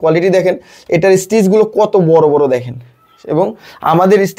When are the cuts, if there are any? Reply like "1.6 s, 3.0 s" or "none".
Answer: none